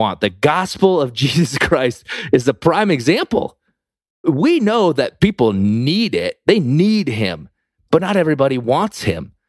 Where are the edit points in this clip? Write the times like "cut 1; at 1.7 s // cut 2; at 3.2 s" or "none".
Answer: cut 1; at 4.2 s

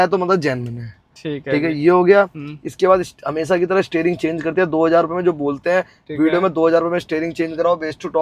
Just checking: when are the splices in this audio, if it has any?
none

